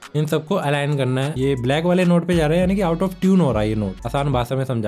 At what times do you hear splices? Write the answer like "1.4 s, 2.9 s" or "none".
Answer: 1.3 s, 4.0 s